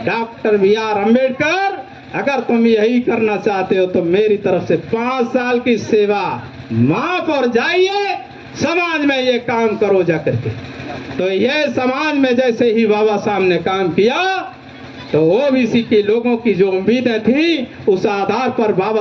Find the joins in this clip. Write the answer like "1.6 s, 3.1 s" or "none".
none